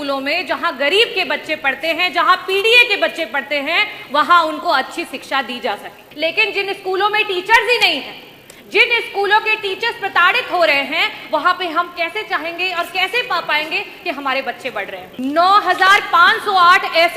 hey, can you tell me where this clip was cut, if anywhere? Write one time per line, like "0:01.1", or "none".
0:06.0
0:15.1